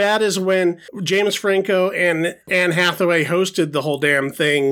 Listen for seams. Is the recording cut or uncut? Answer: cut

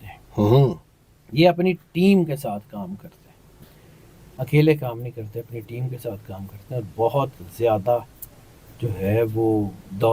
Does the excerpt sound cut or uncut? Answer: uncut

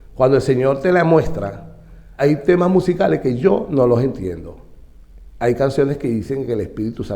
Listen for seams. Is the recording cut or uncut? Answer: cut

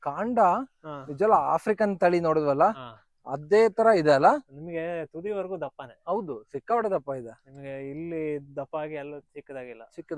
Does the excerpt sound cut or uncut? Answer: uncut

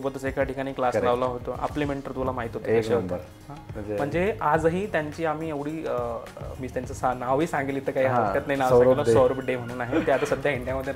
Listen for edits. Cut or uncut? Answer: uncut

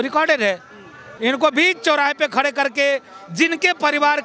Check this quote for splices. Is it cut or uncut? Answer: cut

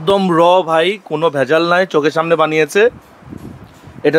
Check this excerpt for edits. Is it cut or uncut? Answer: uncut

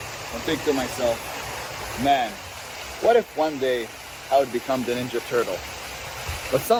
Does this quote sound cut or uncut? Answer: uncut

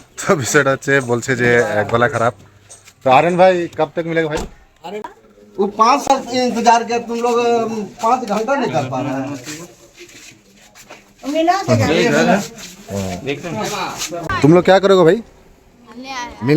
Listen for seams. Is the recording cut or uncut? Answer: cut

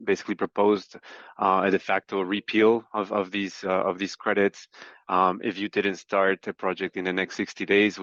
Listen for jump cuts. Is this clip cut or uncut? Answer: uncut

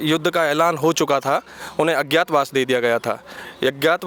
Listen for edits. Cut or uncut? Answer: uncut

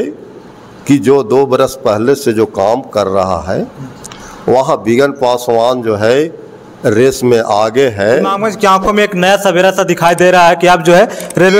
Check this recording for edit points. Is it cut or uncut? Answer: cut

